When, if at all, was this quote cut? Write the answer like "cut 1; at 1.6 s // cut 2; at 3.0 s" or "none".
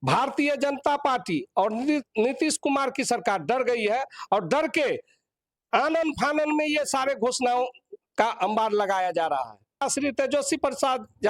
cut 1; at 9.8 s